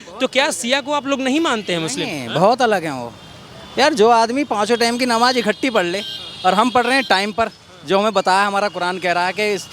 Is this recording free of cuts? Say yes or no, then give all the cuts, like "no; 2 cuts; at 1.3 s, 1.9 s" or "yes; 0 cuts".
yes; 0 cuts